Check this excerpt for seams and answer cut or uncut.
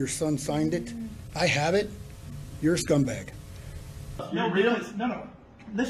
cut